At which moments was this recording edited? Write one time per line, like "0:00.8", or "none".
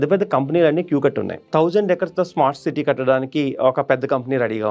0:01.5